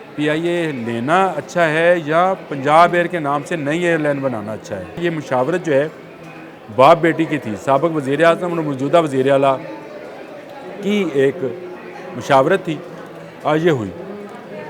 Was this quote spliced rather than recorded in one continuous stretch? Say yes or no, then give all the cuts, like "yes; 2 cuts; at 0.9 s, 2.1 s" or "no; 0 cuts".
yes; 1 cut; at 5.0 s